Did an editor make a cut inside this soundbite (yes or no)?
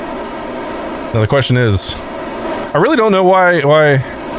yes